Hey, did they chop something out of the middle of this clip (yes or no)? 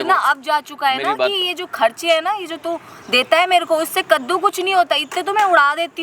no